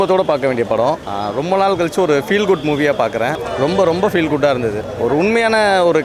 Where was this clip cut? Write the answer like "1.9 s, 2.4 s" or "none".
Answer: 1.0 s, 3.4 s, 4.8 s